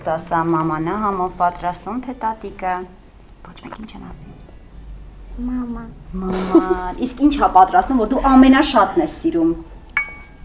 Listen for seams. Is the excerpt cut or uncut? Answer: uncut